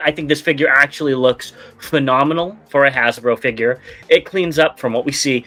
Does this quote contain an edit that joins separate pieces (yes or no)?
no